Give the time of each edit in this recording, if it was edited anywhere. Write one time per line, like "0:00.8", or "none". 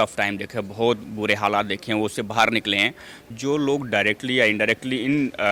0:03.3